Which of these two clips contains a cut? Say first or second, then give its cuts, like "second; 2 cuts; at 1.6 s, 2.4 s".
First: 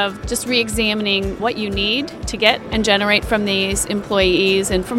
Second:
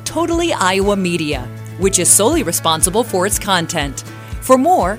first; 1 cut; at 1.4 s